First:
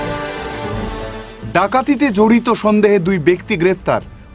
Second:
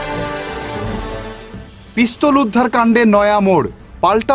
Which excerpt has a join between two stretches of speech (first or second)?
second